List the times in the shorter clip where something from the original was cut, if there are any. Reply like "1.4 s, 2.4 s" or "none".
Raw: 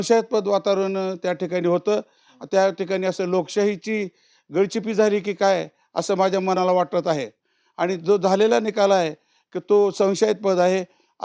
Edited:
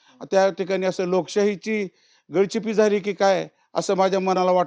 none